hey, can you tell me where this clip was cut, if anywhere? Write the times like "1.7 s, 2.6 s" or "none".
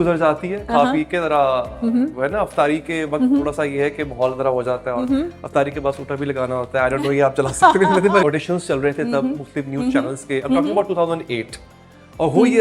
8.2 s